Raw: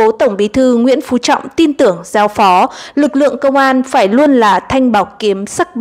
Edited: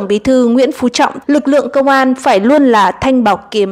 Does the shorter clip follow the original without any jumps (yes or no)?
no